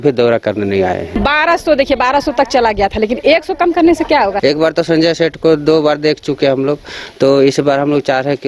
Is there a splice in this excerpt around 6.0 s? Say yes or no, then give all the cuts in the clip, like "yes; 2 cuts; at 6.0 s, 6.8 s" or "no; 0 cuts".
no; 2 cuts; at 1.1 s, 4.4 s